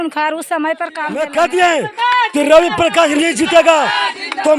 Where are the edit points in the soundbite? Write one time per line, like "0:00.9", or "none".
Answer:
0:01.1